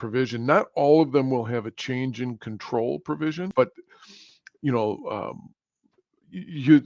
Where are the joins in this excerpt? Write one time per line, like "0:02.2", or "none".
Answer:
0:03.5